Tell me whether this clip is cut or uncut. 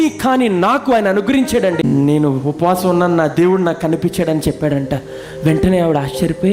cut